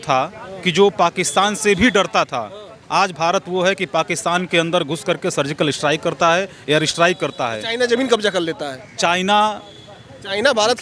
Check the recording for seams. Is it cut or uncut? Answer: uncut